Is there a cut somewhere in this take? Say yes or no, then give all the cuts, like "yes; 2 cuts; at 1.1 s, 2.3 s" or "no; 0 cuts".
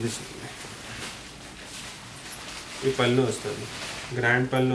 no; 0 cuts